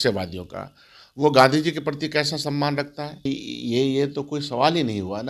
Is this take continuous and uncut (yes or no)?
no